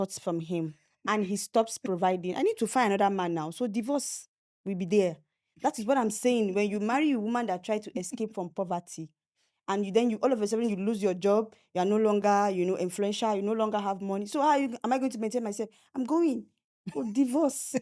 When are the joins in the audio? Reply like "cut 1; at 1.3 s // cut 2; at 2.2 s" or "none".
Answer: none